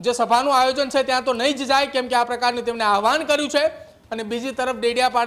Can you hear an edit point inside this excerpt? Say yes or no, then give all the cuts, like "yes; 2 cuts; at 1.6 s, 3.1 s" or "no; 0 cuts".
no; 0 cuts